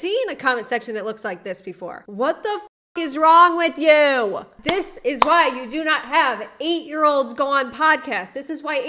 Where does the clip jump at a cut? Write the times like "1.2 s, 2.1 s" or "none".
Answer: 2.0 s

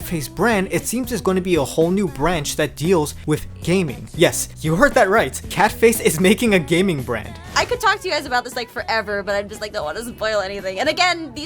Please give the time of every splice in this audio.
4.3 s, 5.4 s, 7.4 s

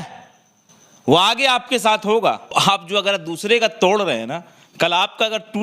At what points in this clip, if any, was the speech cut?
2.5 s

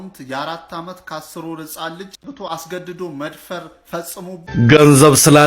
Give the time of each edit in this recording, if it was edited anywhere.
2.2 s, 4.4 s

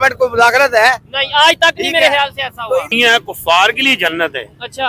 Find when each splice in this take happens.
2.9 s

